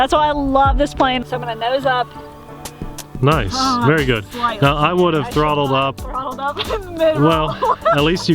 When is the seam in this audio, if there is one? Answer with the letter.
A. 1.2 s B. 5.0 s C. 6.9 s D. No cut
A